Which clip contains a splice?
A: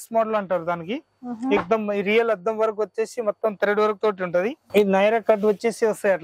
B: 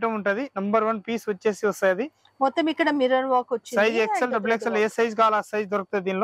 A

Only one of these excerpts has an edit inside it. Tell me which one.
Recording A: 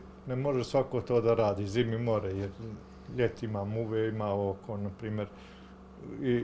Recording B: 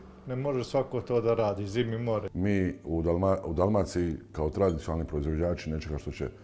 B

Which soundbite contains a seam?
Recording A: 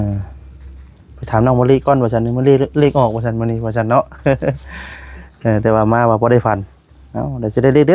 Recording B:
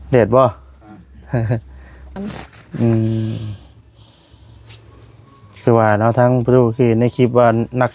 B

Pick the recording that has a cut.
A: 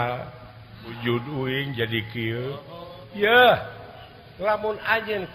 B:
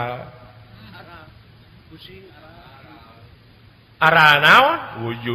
A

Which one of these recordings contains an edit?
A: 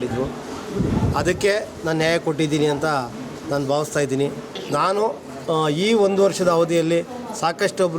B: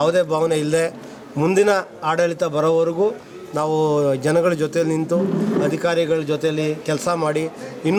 A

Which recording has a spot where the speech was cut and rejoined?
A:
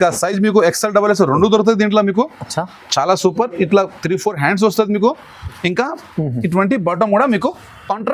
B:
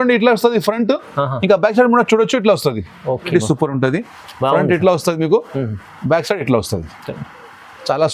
B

